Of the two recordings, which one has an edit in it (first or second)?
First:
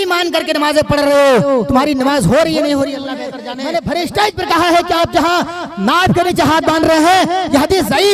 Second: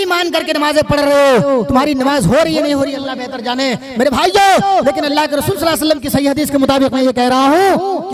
first